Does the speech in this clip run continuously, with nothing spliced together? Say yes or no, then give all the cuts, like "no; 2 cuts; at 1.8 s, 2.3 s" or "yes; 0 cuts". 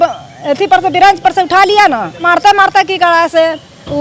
no; 1 cut; at 2.2 s